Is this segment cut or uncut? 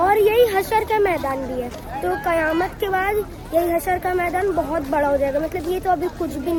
uncut